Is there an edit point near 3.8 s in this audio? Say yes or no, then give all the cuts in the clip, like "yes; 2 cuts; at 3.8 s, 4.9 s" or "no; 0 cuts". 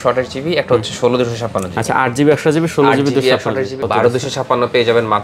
yes; 1 cut; at 3.8 s